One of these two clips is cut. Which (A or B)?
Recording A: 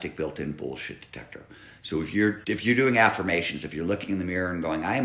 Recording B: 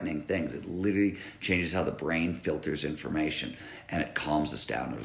A